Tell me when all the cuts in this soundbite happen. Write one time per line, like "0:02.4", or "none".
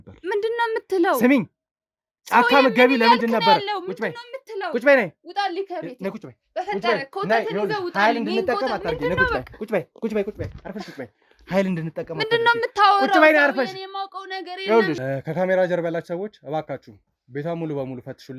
0:15.0